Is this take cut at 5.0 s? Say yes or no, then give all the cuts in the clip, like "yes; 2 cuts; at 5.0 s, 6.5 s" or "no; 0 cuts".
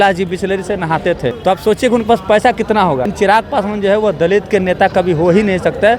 no; 2 cuts; at 1.4 s, 3.1 s